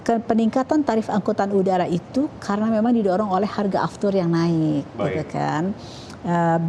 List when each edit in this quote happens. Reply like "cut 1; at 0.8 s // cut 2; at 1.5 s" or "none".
none